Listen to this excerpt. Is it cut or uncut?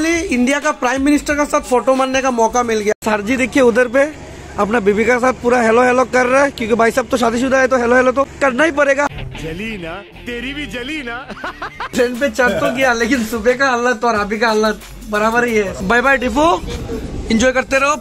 cut